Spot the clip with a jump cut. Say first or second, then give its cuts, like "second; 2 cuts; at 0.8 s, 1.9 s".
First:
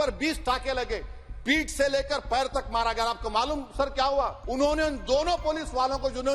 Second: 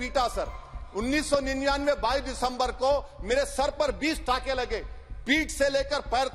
first; 1 cut; at 4.4 s